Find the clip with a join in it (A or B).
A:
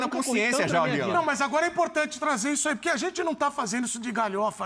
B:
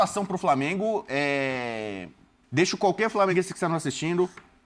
B